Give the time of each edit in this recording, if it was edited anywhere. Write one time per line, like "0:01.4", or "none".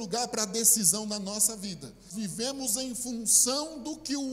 0:02.1

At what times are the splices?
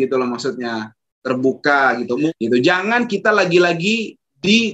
0:02.3

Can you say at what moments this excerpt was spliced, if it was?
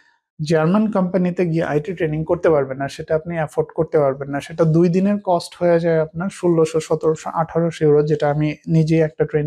none

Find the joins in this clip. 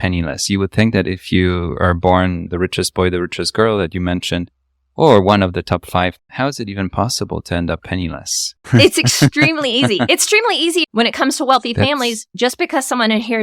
0:02.4
0:06.2

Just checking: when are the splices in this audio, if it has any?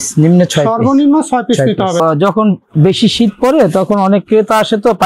0:02.0

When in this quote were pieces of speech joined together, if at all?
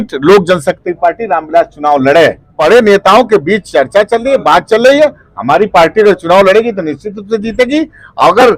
0:02.5

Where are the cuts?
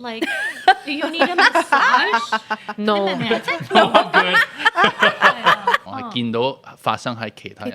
0:05.8

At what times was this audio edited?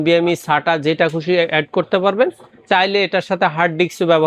none

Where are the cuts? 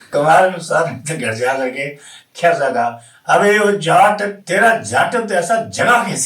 0:04.4

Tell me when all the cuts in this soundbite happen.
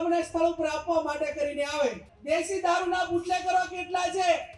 0:02.1

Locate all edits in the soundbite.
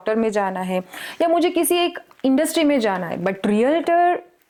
none

